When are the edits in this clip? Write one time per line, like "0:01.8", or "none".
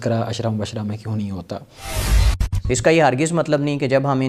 0:02.1